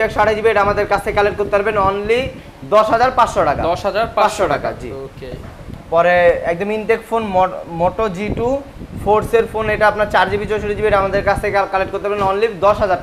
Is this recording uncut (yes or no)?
yes